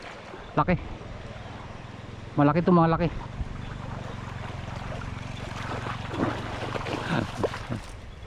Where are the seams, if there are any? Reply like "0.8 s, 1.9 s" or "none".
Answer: none